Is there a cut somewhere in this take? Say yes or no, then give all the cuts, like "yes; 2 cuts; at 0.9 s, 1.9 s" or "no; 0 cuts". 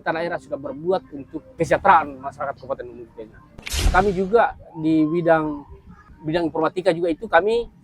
yes; 1 cut; at 3.7 s